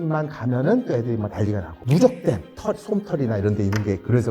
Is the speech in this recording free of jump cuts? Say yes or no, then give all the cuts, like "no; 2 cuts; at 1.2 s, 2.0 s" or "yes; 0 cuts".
no; 2 cuts; at 1.7 s, 2.5 s